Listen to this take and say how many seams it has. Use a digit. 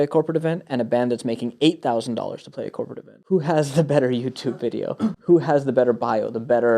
1